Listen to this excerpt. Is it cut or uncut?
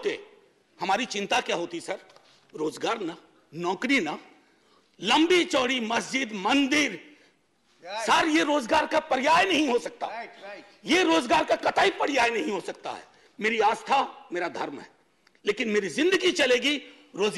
uncut